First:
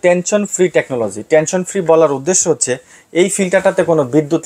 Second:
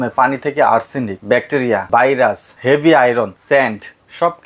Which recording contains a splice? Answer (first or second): second